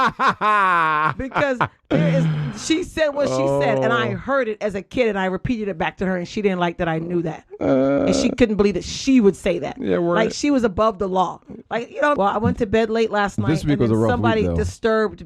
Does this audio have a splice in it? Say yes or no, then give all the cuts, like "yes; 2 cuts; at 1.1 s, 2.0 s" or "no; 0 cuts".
yes; 1 cut; at 12.2 s